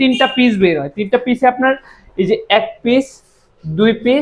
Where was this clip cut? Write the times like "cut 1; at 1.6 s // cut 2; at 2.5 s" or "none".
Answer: none